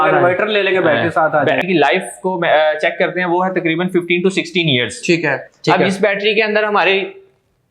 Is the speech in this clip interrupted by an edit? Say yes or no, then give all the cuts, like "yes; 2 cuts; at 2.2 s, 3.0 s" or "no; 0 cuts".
yes; 2 cuts; at 1.6 s, 5.5 s